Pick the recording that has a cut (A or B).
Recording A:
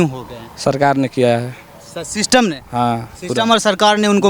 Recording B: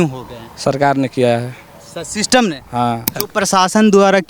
B